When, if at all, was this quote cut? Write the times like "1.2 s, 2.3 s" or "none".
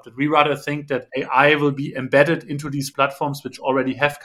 1.1 s, 2.9 s